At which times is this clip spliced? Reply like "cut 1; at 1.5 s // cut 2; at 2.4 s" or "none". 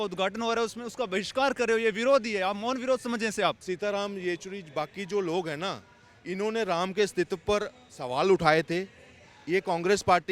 cut 1; at 3.6 s